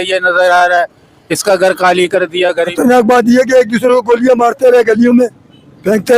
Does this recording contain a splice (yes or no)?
yes